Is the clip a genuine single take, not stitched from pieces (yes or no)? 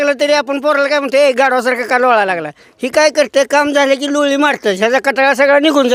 yes